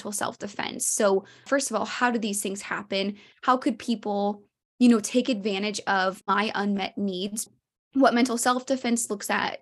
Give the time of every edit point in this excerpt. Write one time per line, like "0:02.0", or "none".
0:01.4
0:06.2
0:07.5